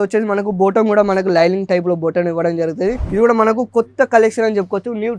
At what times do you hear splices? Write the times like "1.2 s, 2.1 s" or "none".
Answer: 3.0 s